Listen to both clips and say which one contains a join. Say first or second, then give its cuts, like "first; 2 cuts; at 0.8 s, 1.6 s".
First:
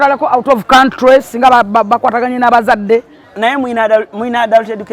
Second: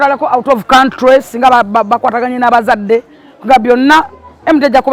first; 1 cut; at 3.2 s